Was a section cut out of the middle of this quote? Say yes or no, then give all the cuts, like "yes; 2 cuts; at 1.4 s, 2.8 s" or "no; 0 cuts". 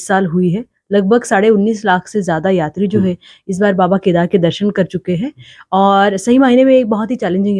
no; 0 cuts